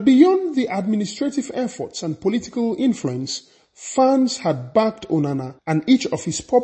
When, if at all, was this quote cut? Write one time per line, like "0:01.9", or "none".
0:05.5